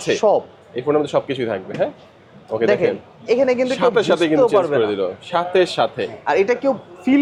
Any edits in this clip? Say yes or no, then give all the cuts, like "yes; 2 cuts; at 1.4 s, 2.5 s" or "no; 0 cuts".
no; 0 cuts